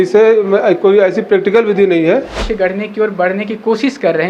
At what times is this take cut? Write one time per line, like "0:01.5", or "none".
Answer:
0:02.4